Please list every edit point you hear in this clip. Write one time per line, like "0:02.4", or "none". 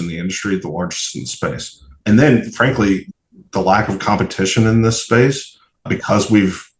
0:02.0
0:03.1
0:05.9